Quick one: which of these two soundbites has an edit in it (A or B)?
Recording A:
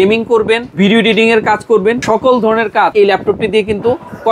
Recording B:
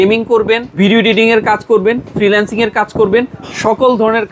A